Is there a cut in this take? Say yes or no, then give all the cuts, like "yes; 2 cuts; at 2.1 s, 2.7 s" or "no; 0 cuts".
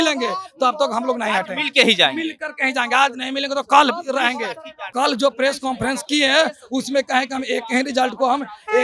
yes; 1 cut; at 4.9 s